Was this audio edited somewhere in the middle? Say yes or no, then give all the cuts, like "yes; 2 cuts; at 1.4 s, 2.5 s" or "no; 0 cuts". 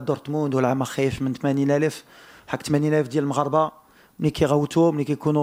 no; 0 cuts